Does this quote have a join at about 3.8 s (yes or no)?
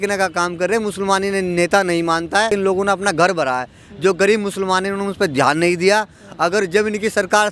no